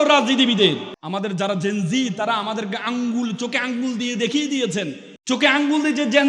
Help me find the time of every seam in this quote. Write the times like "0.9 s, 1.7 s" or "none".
0.9 s, 5.1 s